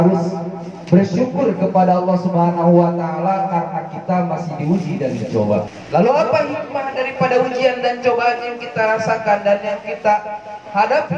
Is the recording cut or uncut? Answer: cut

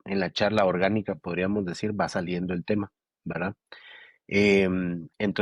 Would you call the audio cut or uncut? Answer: uncut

